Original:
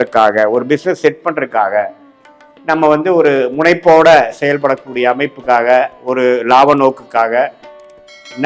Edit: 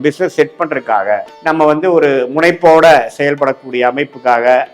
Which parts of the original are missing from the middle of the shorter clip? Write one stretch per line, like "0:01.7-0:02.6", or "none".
0:02.0-0:02.5